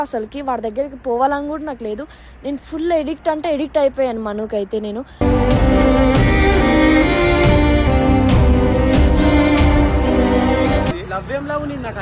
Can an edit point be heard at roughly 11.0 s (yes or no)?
yes